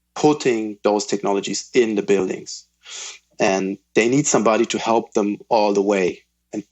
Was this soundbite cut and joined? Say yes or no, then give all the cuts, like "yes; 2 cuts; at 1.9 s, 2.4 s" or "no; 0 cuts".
no; 0 cuts